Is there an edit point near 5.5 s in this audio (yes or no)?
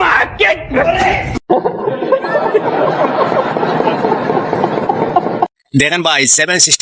no